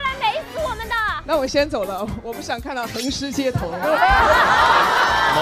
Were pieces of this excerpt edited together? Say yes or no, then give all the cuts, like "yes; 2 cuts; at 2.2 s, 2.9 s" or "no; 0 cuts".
yes; 1 cut; at 1.2 s